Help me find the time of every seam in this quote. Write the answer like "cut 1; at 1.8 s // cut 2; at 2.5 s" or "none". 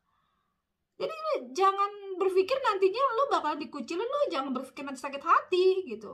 none